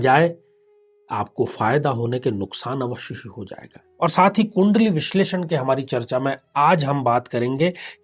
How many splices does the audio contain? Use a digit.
1